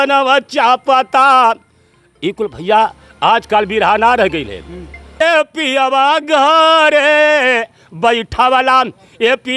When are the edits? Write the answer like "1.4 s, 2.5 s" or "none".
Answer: 5.1 s